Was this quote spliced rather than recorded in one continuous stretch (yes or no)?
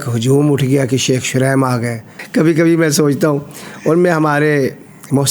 no